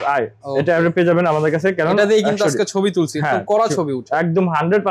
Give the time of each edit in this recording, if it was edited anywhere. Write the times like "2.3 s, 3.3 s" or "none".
none

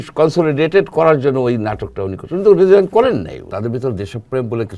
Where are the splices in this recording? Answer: 3.4 s

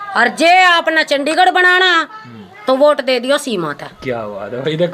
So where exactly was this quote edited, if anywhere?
none

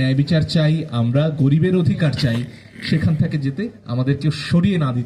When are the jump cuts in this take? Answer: none

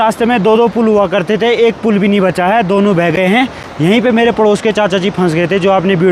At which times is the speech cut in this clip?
none

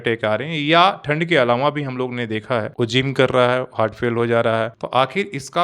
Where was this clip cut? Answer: 2.7 s, 4.7 s

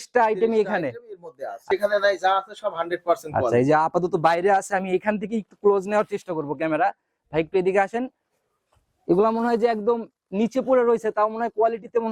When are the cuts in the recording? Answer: 1.5 s

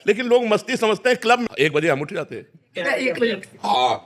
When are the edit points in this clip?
1.4 s

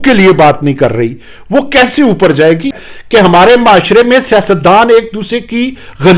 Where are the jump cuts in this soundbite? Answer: 2.8 s

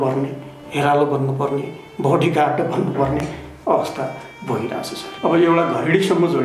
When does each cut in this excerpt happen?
5.0 s

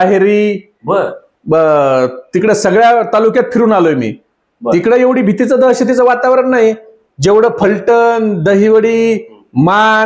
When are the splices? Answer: none

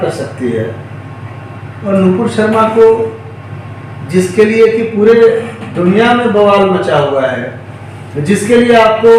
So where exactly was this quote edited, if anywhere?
none

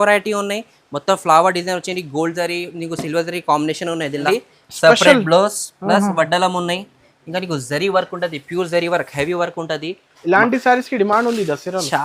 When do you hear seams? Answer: 4.3 s

